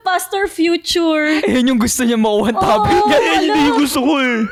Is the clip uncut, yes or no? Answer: yes